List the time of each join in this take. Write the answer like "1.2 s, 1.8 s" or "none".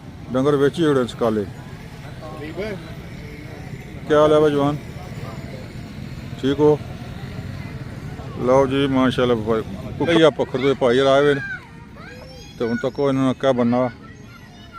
10.1 s